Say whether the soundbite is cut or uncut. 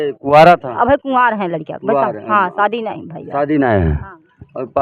uncut